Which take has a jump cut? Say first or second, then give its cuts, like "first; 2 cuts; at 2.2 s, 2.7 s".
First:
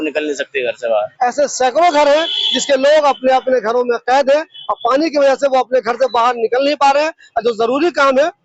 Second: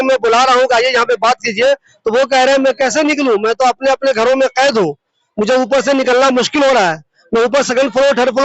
first; 1 cut; at 1.1 s